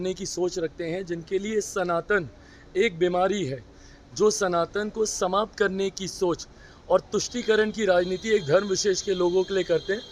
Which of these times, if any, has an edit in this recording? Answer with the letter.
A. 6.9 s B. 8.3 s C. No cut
C